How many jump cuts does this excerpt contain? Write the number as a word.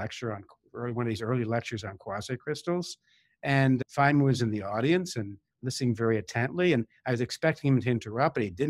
one